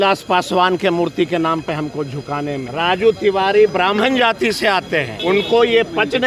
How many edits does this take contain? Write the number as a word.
two